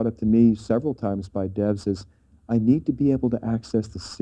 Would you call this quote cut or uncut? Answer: uncut